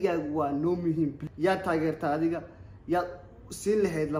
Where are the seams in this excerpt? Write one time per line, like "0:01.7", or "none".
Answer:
0:01.2